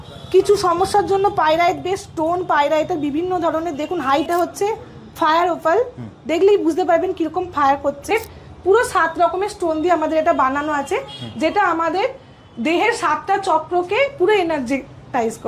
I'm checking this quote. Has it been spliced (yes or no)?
yes